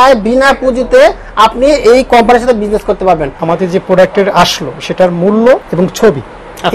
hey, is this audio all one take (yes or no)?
no